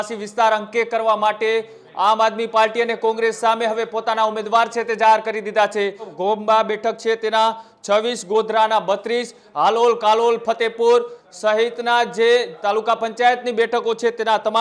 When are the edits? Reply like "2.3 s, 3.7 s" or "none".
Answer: 6.1 s